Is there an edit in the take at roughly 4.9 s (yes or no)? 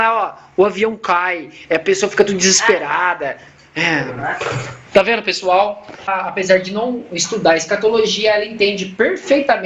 no